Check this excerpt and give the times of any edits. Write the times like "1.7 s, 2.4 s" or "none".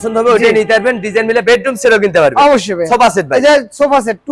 none